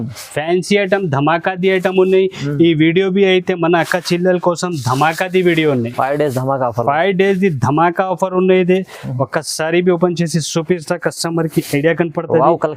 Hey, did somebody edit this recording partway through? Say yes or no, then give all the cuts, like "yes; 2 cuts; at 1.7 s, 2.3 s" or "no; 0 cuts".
no; 0 cuts